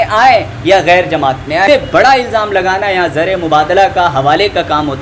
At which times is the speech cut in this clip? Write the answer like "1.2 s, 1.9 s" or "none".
1.7 s